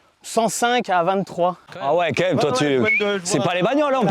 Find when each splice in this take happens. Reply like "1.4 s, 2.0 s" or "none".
1.7 s

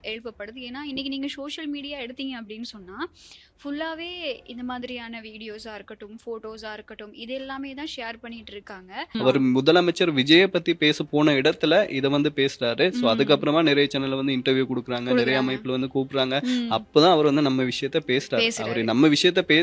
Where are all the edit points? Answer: 9.1 s

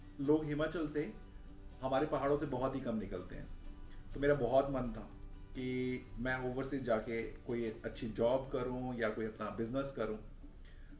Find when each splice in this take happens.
none

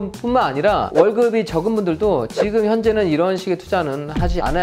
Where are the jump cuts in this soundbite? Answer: none

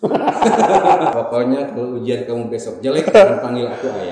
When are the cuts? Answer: 1.1 s

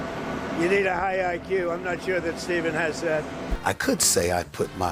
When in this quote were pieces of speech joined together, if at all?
3.6 s

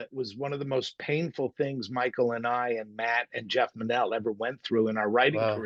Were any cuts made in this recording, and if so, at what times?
none

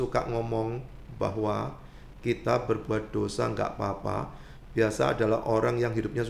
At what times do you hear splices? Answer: none

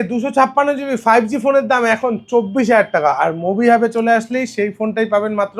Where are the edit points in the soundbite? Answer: none

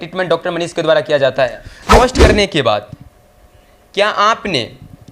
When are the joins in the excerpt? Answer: 2.0 s

